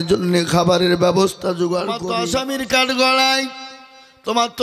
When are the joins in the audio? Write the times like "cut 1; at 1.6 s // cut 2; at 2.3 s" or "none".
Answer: cut 1; at 2.0 s